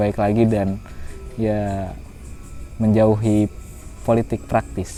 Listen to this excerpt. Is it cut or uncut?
uncut